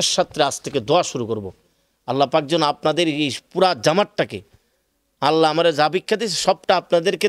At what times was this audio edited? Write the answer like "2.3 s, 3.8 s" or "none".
none